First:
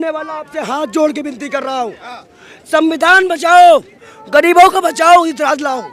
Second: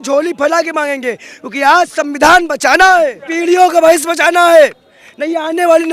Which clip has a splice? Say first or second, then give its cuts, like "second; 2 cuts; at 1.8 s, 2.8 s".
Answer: second; 1 cut; at 3.2 s